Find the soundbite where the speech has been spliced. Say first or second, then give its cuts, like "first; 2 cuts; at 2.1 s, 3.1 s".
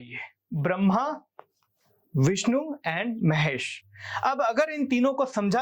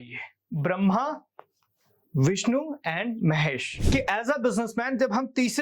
second; 1 cut; at 3.7 s